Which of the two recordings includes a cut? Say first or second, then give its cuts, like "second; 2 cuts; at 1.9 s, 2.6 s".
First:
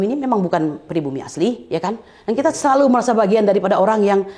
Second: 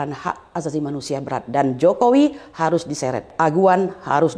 second; 1 cut; at 3.3 s